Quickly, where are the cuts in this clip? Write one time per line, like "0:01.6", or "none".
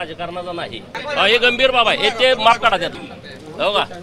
0:00.9
0:03.0